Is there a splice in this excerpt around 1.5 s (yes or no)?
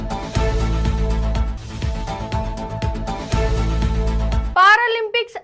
no